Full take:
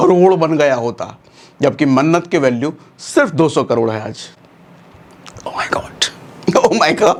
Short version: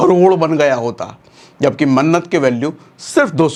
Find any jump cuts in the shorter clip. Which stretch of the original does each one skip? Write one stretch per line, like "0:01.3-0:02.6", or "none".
none